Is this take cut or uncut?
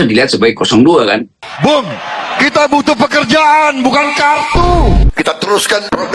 cut